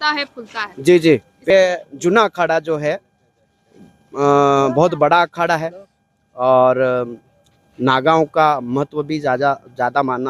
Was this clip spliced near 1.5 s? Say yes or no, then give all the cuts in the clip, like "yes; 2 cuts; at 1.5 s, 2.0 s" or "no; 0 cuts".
yes; 1 cut; at 1.5 s